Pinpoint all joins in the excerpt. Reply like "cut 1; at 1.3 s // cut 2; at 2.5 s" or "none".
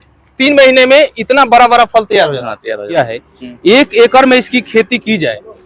cut 1; at 3.0 s